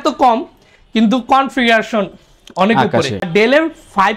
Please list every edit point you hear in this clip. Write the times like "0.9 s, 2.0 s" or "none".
3.3 s